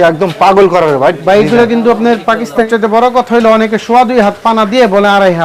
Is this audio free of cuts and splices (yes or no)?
no